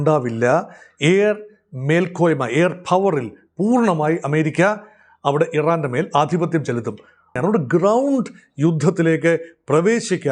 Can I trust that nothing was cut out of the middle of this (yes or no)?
no